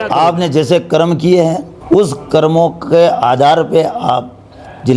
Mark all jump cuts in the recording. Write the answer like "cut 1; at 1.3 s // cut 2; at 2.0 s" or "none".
cut 1; at 1.7 s